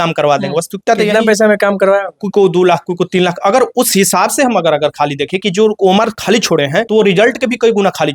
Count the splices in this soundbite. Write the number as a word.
one